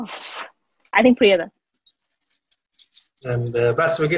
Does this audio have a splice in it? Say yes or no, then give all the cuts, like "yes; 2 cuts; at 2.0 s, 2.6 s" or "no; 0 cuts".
no; 0 cuts